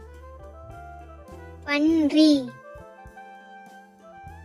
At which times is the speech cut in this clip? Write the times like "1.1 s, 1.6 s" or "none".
none